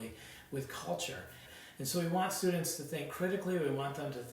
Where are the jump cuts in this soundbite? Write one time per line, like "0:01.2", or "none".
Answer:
0:01.4